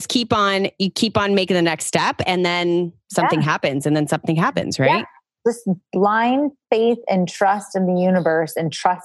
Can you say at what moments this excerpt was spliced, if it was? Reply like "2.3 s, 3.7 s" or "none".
5.8 s